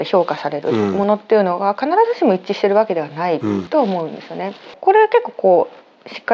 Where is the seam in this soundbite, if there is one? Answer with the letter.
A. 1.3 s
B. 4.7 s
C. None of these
B